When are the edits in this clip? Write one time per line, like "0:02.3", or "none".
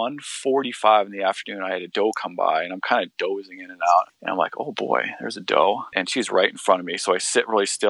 0:04.1
0:05.9